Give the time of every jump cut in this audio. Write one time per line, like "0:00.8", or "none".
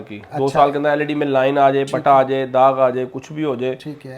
none